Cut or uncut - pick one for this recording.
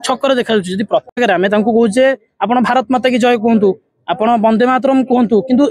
cut